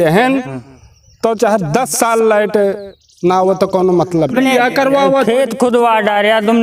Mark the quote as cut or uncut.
cut